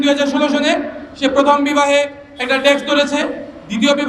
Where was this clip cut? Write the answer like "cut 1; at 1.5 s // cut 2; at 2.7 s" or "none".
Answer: none